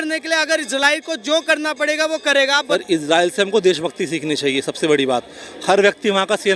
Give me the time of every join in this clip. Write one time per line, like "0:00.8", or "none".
0:02.6

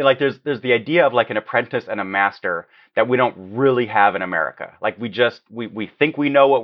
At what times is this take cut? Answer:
none

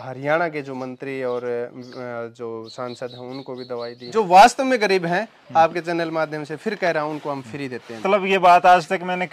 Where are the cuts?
0:04.0
0:08.0

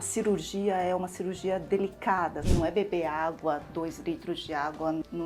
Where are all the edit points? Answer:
0:02.4

